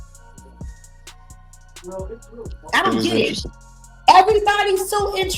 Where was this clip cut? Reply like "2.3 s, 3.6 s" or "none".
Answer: 1.4 s